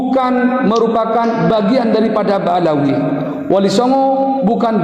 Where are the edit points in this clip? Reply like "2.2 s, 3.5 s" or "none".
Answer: none